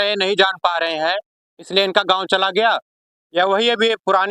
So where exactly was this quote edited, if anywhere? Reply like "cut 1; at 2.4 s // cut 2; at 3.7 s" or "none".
none

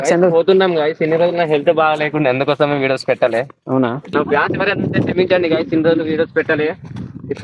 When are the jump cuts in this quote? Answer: cut 1; at 4.0 s

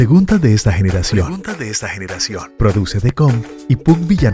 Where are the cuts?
none

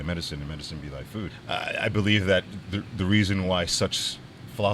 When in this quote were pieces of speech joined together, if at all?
cut 1; at 1.3 s

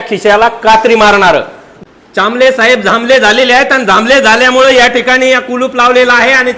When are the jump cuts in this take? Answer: cut 1; at 1.9 s

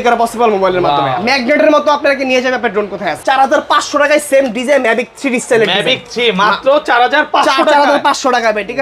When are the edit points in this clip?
cut 1; at 3.2 s

